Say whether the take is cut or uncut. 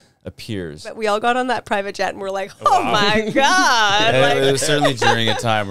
cut